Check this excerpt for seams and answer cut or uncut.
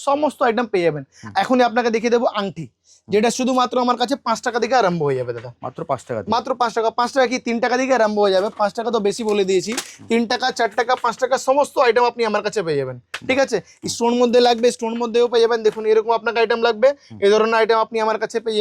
uncut